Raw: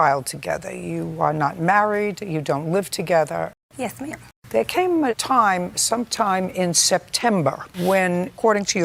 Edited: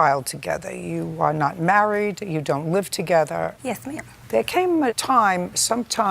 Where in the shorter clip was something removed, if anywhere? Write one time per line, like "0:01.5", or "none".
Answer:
0:03.8